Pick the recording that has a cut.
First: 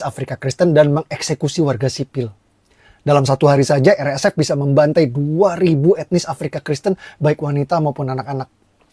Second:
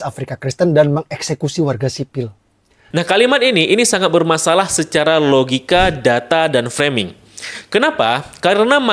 first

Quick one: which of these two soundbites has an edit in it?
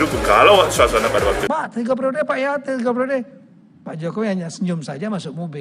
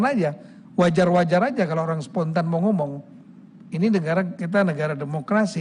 first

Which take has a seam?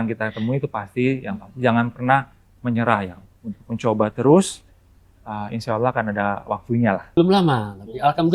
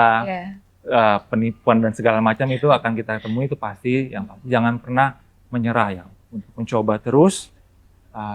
first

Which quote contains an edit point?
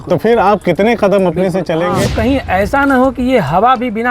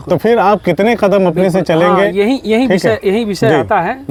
first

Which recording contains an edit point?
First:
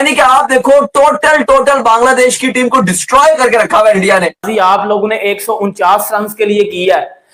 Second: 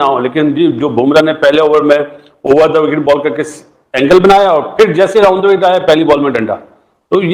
first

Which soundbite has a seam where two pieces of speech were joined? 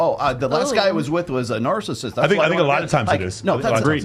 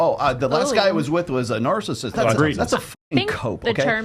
second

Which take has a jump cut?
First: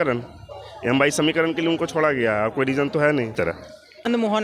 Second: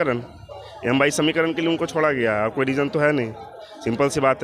first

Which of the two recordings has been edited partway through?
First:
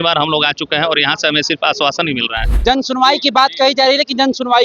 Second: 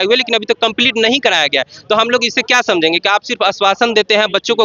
first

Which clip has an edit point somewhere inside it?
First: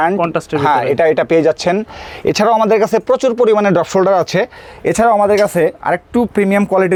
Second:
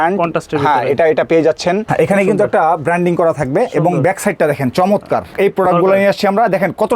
second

